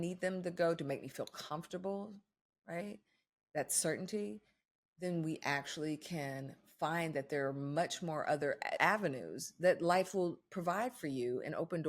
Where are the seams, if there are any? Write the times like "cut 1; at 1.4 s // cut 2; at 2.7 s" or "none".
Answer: cut 1; at 8.8 s